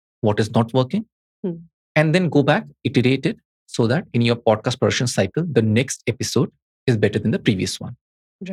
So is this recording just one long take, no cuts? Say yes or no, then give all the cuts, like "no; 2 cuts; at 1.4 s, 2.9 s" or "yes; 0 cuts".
yes; 0 cuts